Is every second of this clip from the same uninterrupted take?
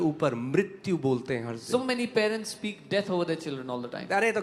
yes; 0 cuts

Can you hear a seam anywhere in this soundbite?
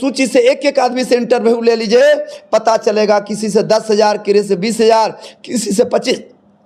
no; 0 cuts

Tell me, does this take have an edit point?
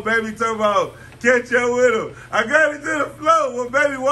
no; 0 cuts

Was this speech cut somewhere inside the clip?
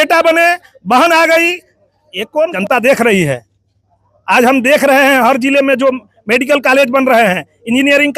yes; 1 cut; at 2.5 s

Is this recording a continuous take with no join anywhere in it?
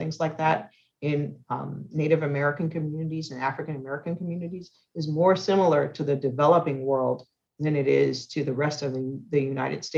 yes; 0 cuts

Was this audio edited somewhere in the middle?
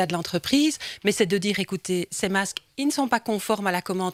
no; 0 cuts

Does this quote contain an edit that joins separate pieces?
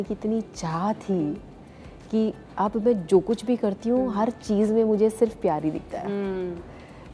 no; 0 cuts

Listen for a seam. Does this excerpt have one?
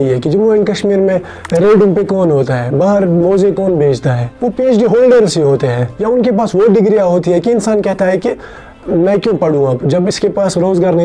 no; 0 cuts

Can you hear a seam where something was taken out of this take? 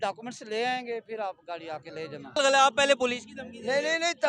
yes; 1 cut; at 2.4 s

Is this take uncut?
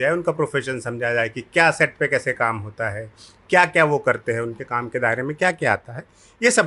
yes; 0 cuts

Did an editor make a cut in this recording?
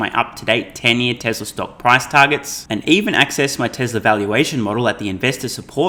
no; 0 cuts

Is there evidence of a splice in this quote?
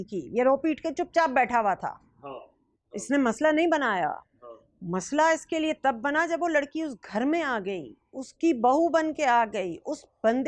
no; 0 cuts

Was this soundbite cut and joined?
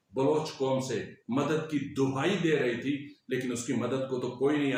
no; 0 cuts

